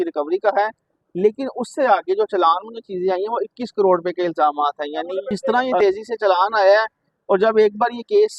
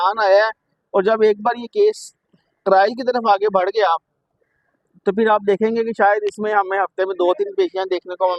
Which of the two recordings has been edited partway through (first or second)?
first